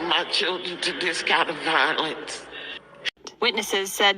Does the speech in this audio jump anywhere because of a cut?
yes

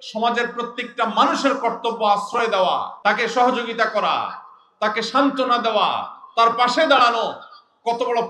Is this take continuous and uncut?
no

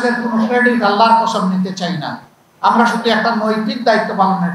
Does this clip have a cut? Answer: no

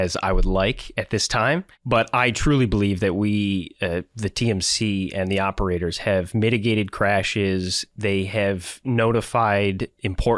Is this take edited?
yes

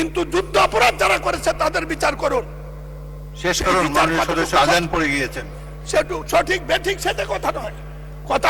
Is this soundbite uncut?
yes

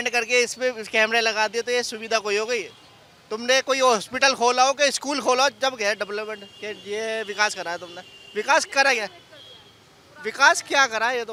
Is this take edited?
no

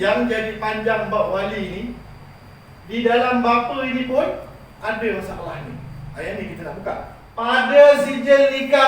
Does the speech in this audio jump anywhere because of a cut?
yes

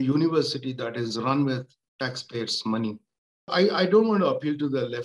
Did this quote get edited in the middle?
yes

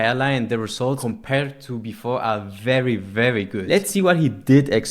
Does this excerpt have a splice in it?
yes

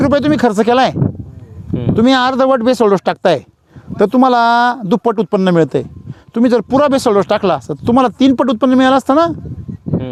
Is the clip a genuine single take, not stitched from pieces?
yes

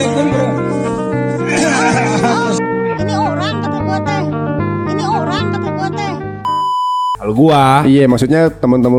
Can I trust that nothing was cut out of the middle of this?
yes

